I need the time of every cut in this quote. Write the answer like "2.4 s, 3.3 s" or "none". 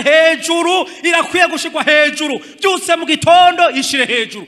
none

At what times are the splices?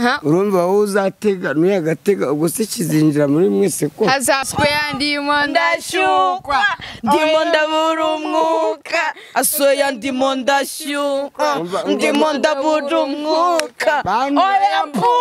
4.4 s

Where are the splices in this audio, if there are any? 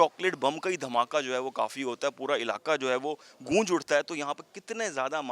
none

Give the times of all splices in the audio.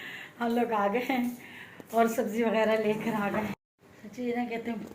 4.0 s

